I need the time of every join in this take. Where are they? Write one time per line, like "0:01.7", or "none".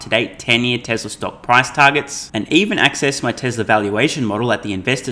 none